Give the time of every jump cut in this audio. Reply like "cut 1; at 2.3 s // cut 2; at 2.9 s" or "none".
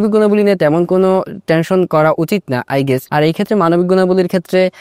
cut 1; at 3.1 s

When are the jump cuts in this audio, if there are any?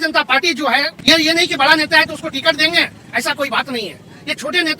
cut 1; at 0.9 s

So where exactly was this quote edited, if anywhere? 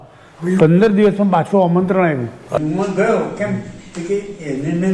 cut 1; at 2.6 s

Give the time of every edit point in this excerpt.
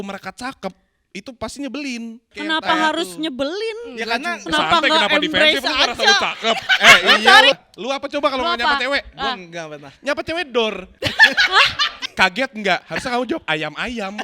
cut 1; at 2.3 s // cut 2; at 7.5 s // cut 3; at 12.1 s

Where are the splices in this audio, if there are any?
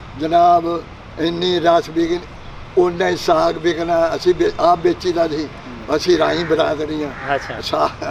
none

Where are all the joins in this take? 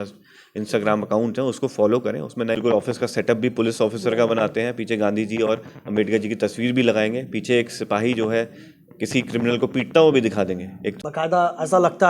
cut 1; at 2.6 s // cut 2; at 10.9 s

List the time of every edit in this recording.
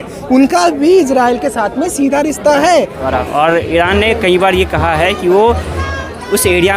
cut 1; at 3.1 s

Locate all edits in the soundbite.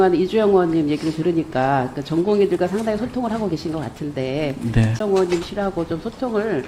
cut 1; at 5.0 s

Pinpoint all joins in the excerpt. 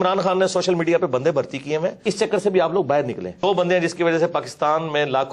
cut 1; at 2.0 s // cut 2; at 3.4 s

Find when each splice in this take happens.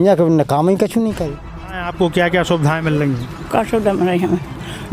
cut 1; at 1.9 s

